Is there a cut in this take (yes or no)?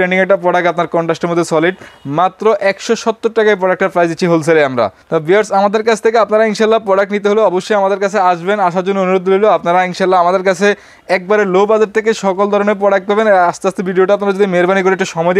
no